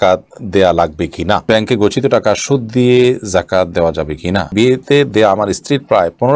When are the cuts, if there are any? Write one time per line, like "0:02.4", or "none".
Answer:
0:01.5
0:04.5